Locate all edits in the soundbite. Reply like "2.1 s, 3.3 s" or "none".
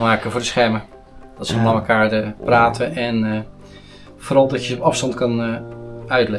none